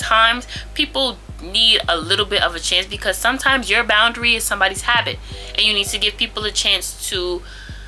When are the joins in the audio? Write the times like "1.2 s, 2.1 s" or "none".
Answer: none